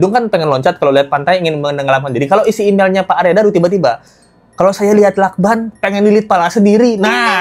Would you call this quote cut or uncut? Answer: uncut